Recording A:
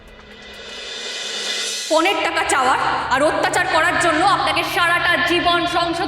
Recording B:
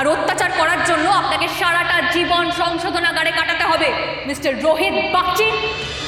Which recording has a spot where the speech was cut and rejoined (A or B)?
A